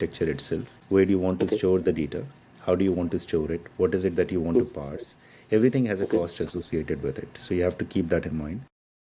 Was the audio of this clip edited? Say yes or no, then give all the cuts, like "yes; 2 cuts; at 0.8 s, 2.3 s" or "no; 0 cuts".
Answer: no; 0 cuts